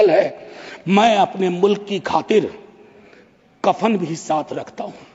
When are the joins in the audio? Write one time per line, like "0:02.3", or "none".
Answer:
none